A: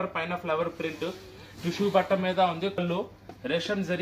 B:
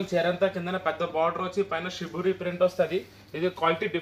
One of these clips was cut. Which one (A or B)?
A